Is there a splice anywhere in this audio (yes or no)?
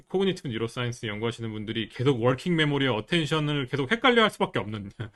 no